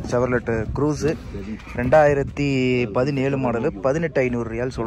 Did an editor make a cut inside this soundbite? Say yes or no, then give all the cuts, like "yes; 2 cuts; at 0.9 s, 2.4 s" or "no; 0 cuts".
no; 0 cuts